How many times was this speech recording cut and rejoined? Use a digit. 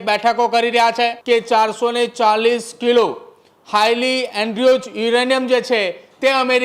1